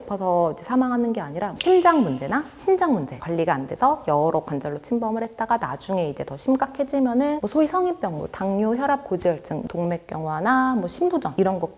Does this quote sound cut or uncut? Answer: uncut